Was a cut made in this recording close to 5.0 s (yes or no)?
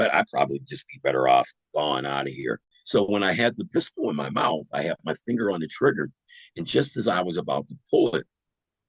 no